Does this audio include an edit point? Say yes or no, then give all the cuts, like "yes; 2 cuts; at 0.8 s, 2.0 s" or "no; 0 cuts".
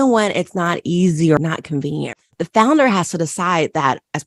yes; 1 cut; at 2.2 s